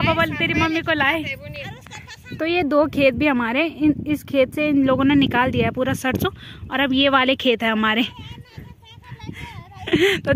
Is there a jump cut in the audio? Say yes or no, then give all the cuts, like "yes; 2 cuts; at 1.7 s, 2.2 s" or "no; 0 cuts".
no; 0 cuts